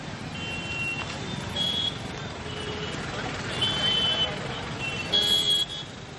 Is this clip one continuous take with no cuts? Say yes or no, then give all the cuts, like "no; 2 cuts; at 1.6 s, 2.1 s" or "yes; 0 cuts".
yes; 0 cuts